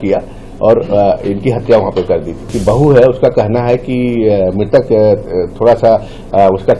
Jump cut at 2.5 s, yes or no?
yes